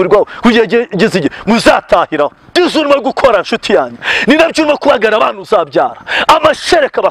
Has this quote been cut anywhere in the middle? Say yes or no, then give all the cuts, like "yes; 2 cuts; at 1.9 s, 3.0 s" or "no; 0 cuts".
yes; 1 cut; at 2.5 s